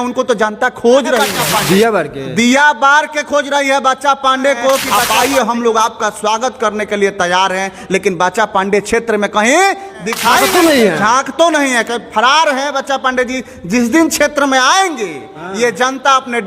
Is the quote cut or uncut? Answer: cut